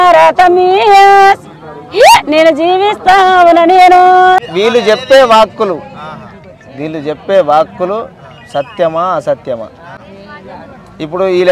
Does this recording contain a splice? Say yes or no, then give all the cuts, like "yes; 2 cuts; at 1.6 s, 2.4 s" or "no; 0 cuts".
yes; 1 cut; at 4.5 s